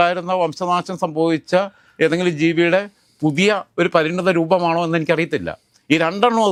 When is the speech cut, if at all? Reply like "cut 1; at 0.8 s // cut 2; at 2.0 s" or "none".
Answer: none